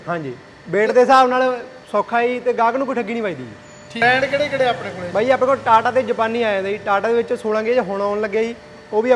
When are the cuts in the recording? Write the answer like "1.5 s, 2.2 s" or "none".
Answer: 4.0 s